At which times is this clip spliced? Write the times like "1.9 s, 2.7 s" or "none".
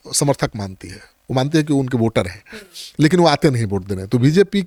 none

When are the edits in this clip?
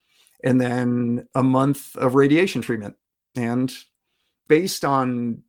1.2 s, 4.4 s

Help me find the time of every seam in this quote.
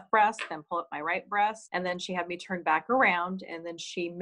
1.6 s

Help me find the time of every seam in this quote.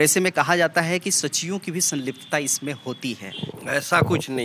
3.5 s

